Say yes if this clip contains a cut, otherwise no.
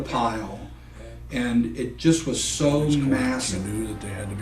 yes